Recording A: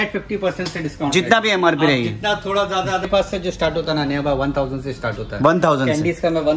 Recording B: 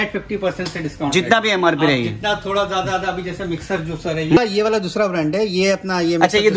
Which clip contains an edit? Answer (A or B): A